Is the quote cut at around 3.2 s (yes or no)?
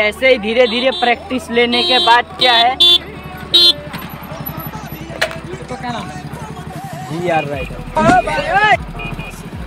no